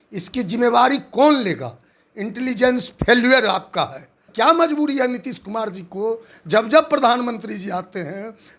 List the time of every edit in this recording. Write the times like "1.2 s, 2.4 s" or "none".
4.2 s